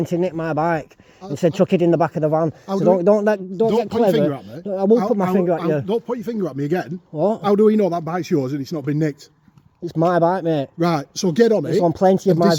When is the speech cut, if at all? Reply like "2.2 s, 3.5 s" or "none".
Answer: none